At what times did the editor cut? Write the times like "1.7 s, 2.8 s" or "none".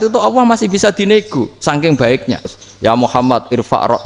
2.6 s

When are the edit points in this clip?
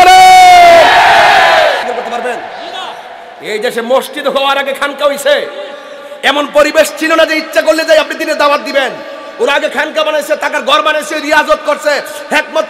1.8 s

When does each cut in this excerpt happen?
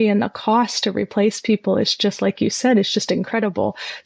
none

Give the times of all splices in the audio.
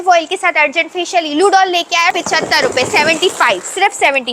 2.1 s

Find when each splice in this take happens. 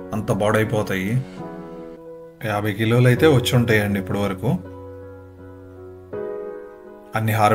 2.0 s

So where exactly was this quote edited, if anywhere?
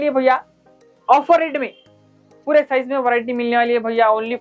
2.4 s

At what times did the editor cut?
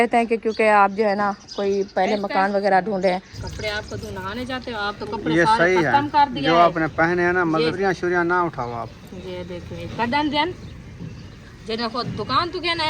3.4 s, 7.8 s

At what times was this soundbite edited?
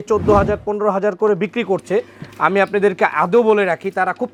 none

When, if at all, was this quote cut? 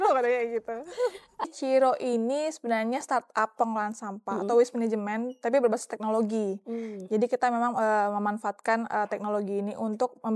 1.4 s

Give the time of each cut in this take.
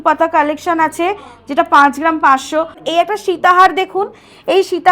2.8 s

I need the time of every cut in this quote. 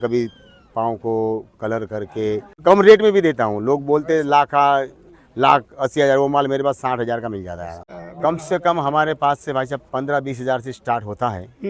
2.6 s, 7.8 s

